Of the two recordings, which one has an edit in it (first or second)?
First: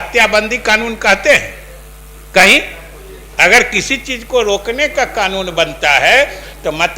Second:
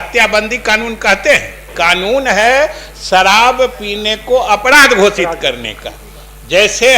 second